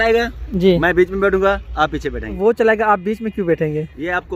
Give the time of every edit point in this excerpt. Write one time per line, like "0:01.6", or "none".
0:02.3